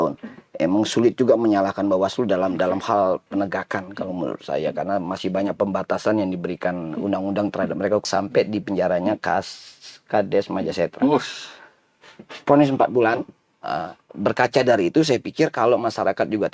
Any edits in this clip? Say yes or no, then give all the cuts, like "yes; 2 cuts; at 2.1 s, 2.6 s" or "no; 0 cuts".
yes; 1 cut; at 8.1 s